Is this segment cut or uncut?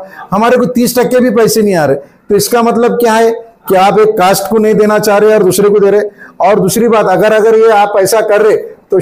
uncut